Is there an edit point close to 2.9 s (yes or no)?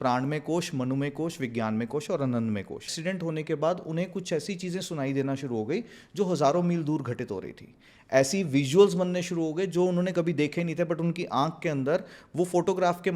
yes